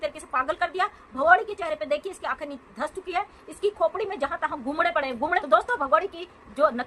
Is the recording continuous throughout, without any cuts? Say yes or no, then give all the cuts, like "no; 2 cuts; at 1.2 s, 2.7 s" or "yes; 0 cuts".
no; 1 cut; at 5.4 s